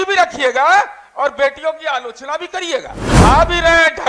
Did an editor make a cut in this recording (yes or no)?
yes